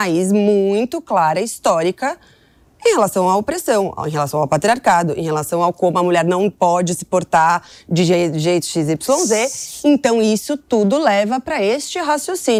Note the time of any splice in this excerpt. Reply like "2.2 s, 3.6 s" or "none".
none